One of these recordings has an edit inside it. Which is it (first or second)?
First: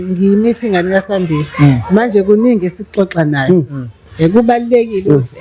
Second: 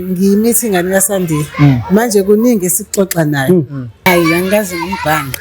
second